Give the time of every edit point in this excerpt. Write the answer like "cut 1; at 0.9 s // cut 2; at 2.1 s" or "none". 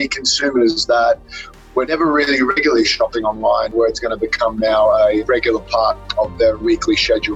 cut 1; at 1.9 s // cut 2; at 3.7 s // cut 3; at 5.2 s // cut 4; at 6.6 s